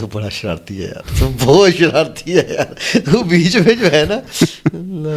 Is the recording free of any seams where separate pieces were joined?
yes; 0 cuts

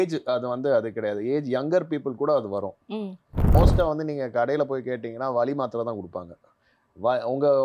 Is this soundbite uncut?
no; 1 cut; at 3.4 s

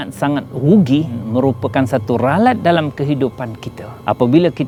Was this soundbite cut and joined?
no; 0 cuts

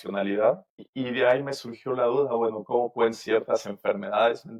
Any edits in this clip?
no; 0 cuts

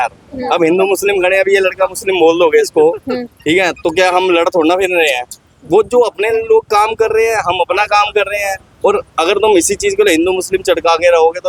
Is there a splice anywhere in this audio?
no; 0 cuts

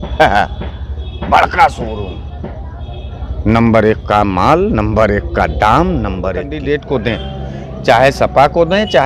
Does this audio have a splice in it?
yes; 1 cut; at 6.5 s

